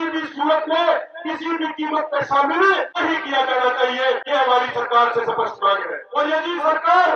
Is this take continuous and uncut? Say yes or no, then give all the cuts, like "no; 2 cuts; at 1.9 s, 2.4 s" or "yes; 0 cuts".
no; 3 cuts; at 2.9 s, 4.2 s, 6.0 s